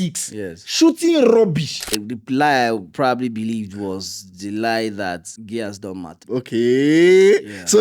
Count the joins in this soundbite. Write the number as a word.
three